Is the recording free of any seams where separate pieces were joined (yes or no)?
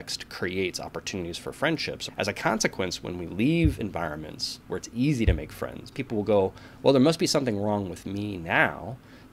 no